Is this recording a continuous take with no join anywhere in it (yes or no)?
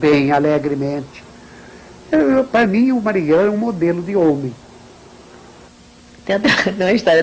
yes